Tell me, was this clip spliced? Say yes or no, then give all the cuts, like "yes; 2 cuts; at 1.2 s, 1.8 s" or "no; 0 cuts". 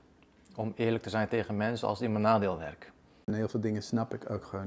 yes; 1 cut; at 3.3 s